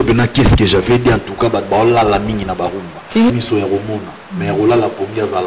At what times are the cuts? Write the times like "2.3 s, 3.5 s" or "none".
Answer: 3.3 s